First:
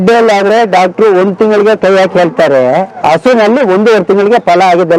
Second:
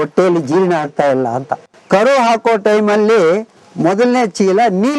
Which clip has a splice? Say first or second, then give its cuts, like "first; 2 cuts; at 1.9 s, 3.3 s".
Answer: second; 1 cut; at 1.7 s